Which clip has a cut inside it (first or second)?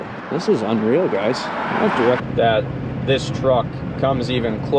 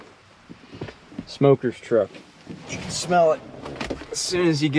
first